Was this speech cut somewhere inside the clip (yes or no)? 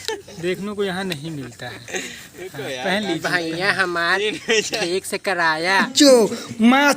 yes